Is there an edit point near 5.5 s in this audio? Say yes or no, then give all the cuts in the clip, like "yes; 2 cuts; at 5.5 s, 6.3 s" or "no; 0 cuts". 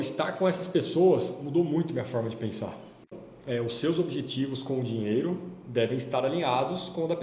no; 1 cut; at 3.0 s